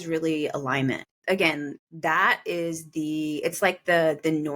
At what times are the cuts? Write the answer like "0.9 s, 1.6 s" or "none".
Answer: 1.1 s, 1.9 s